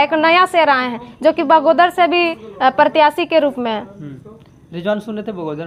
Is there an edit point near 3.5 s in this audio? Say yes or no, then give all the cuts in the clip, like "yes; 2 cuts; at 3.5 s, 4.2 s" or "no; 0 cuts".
no; 0 cuts